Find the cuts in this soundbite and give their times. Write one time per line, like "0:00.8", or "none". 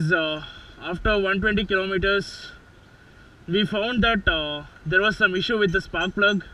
none

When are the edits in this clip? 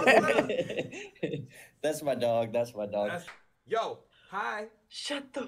0:03.2

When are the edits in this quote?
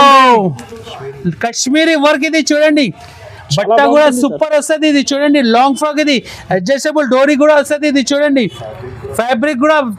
none

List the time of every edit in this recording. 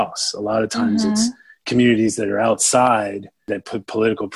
0:03.5

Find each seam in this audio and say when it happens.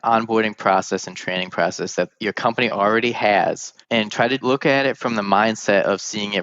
0:04.4

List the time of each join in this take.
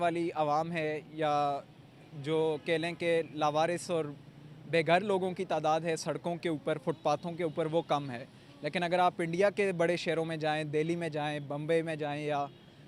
none

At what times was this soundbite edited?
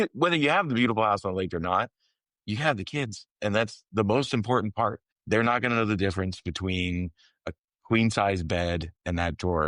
0:05.1

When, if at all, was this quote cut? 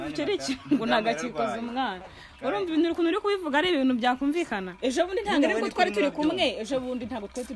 0:04.7

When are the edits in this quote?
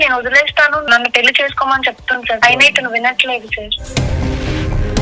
0:00.9
0:02.4

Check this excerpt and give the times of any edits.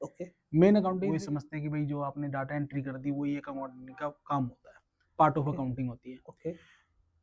0:01.0

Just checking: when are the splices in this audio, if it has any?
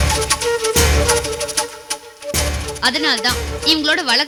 none

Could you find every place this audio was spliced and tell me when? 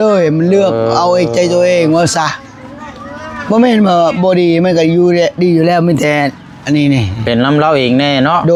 none

